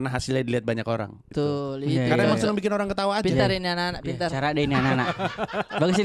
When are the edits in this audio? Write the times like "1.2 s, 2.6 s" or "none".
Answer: 1.3 s